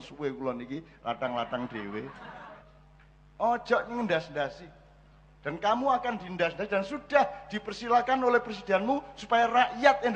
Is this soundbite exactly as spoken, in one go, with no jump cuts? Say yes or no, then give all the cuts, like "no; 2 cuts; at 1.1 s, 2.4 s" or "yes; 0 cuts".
no; 1 cut; at 2.6 s